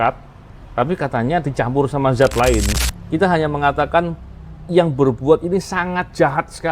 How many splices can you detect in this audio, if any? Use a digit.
1